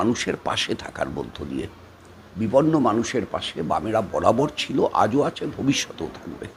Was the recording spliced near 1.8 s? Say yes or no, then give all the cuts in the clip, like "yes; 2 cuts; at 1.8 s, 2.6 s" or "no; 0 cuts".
no; 0 cuts